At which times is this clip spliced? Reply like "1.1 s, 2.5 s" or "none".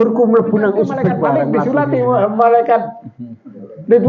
1.5 s